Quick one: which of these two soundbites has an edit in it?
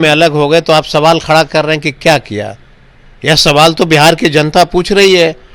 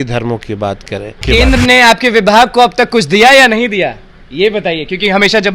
second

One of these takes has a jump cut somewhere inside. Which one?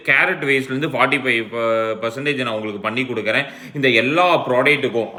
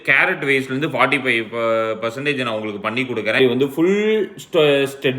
second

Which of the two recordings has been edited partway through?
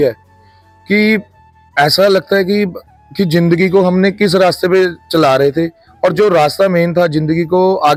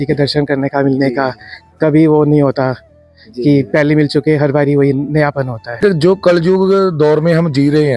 second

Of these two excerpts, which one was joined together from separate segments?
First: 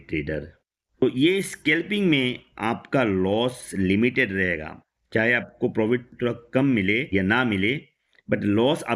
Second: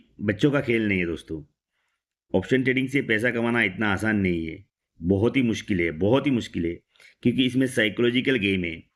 first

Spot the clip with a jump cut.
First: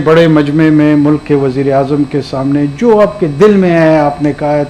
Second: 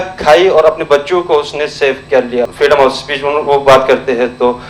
second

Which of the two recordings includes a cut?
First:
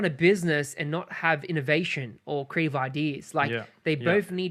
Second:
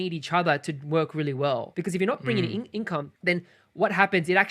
second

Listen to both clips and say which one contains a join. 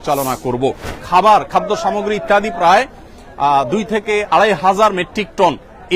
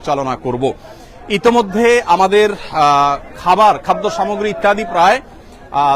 first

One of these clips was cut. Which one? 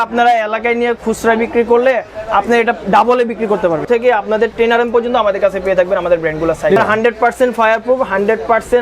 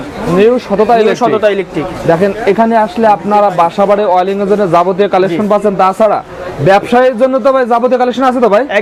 first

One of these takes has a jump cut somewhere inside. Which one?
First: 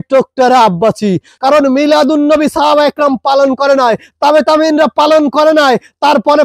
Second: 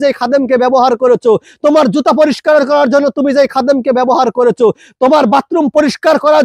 first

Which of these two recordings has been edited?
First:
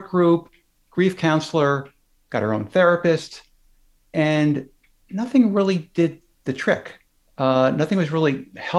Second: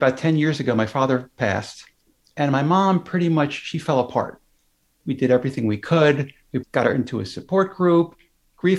second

